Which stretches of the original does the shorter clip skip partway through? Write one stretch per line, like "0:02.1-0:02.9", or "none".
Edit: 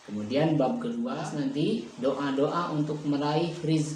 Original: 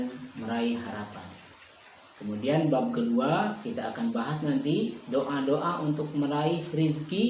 0:03.3-0:04.2